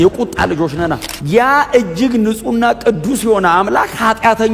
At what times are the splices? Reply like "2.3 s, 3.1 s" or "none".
1.1 s